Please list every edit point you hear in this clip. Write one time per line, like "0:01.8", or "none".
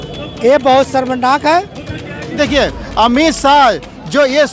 0:02.3